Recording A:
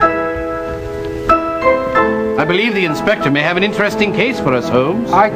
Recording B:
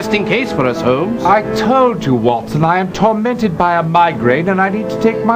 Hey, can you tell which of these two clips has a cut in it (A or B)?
A